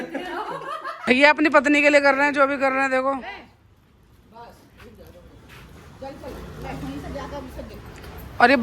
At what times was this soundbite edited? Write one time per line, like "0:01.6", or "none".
0:01.1